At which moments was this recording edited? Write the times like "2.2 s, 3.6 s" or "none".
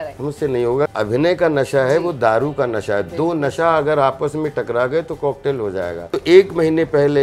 0.9 s, 6.1 s

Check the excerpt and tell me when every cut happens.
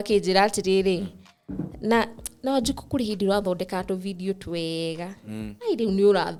none

